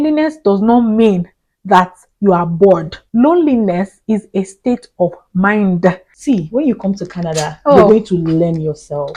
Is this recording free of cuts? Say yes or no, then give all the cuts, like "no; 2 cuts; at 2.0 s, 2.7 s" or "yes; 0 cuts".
no; 2 cuts; at 3.0 s, 6.1 s